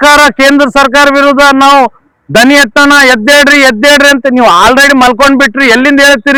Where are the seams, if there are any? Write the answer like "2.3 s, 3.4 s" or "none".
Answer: none